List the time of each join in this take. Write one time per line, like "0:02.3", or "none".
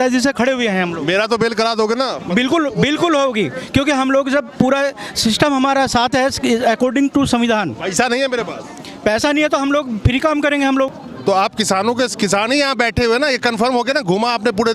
0:11.1